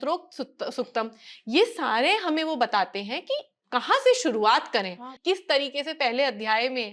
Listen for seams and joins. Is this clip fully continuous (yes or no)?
no